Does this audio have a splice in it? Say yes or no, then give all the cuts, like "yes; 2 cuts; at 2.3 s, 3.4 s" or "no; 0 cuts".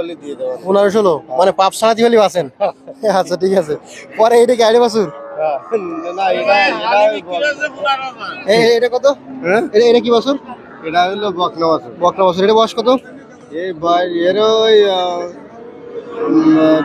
no; 0 cuts